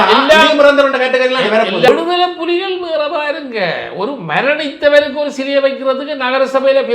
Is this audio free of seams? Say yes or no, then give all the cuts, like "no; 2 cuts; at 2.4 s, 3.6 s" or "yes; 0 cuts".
no; 1 cut; at 1.9 s